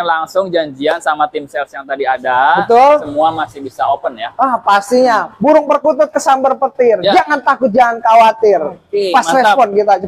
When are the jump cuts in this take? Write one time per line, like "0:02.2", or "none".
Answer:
none